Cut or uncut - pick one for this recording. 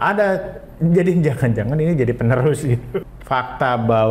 cut